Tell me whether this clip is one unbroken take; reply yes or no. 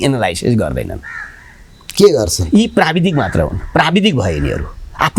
yes